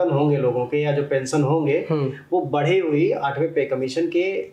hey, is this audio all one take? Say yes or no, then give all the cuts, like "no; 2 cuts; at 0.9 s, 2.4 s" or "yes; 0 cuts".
yes; 0 cuts